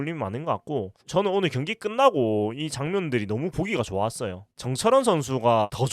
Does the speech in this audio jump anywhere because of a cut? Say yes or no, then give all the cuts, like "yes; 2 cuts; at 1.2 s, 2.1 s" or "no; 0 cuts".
yes; 1 cut; at 4.5 s